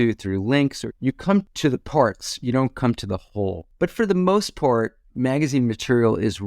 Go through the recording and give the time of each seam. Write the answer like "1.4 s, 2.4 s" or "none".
1.5 s, 3.7 s